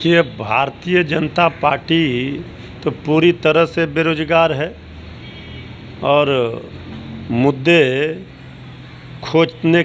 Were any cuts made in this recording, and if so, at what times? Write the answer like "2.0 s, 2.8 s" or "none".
none